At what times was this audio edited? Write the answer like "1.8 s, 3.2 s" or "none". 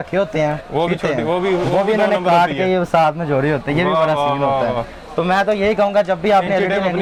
none